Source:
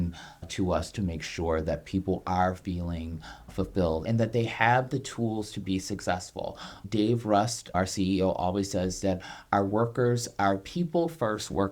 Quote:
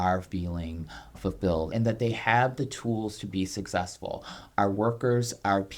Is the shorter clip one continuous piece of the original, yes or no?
no